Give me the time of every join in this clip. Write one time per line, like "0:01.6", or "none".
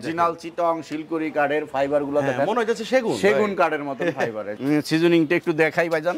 0:04.5